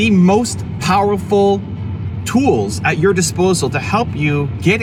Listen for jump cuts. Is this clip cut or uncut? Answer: uncut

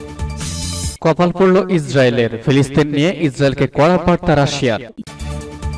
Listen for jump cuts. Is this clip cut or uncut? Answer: cut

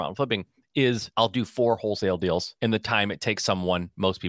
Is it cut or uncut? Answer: cut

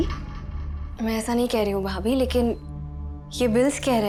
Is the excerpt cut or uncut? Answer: uncut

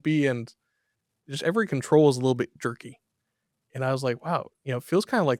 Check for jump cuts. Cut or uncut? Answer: uncut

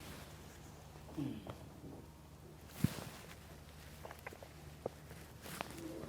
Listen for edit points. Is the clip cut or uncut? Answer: uncut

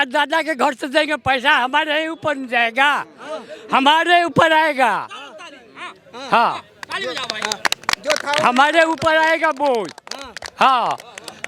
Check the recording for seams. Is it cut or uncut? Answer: uncut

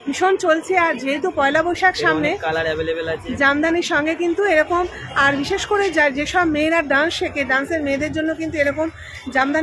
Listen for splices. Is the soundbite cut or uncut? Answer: uncut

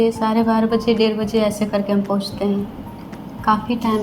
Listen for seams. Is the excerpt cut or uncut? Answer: uncut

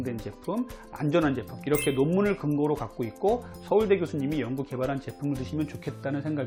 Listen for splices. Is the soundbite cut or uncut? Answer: uncut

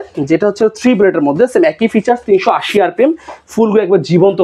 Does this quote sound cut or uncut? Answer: uncut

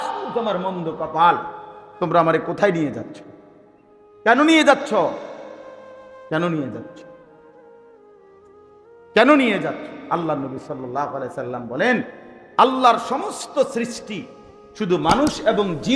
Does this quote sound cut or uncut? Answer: uncut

